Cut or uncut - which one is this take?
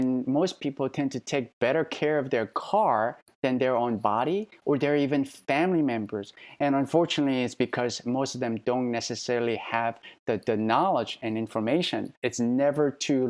cut